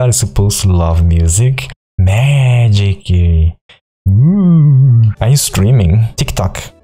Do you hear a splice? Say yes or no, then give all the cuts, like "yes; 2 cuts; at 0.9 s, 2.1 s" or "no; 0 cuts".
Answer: yes; 2 cuts; at 1.7 s, 5.1 s